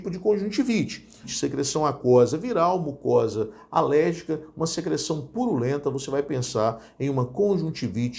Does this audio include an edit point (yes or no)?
yes